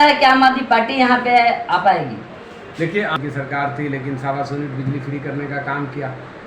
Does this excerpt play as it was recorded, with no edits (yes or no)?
no